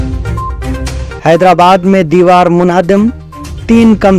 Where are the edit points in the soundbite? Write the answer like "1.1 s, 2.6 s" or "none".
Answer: 1.1 s